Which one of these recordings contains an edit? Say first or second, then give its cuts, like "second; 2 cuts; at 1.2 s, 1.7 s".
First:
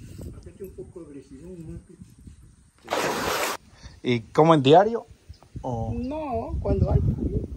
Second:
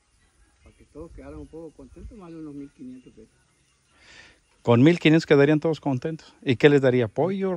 first; 1 cut; at 3.6 s